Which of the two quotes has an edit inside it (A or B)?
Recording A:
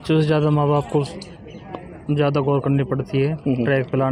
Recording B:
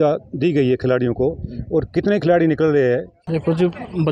B